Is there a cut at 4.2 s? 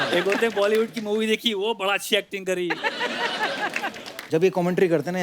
yes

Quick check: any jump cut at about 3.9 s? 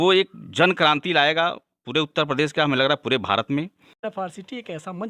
yes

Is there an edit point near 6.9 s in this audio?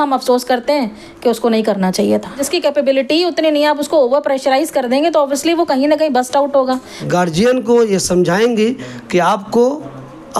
yes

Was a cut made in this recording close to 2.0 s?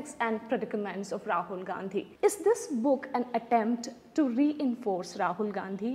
yes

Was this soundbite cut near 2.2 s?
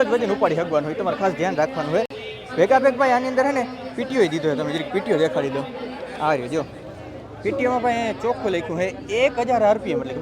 no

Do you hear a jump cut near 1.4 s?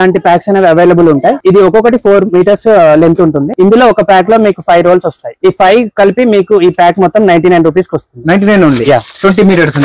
yes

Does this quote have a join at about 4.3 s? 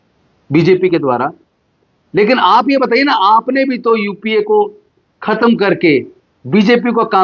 no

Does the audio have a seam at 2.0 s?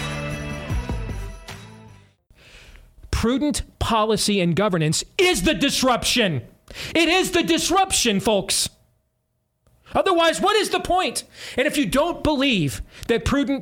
yes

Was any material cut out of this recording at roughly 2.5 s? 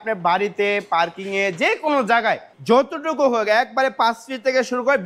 yes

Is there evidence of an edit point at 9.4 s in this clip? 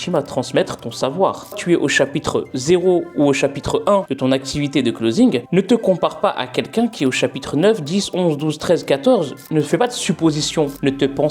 yes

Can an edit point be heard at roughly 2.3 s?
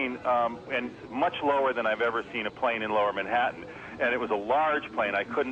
yes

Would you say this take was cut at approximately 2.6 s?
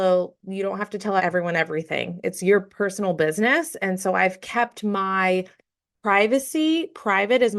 no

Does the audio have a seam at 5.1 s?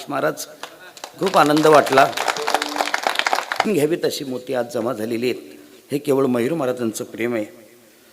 no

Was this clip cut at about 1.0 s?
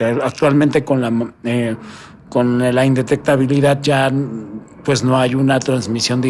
no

